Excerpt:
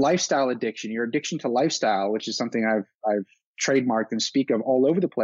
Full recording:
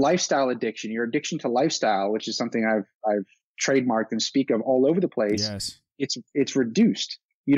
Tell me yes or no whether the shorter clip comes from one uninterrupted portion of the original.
yes